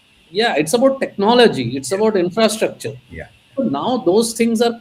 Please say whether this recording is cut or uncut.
uncut